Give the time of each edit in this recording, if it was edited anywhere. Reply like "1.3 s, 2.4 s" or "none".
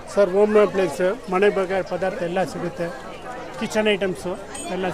none